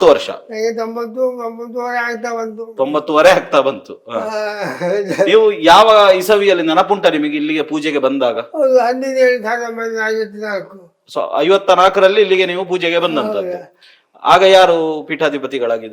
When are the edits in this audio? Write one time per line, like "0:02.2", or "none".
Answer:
none